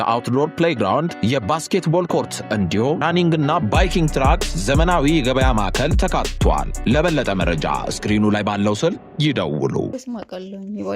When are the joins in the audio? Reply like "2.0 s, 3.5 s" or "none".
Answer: 9.9 s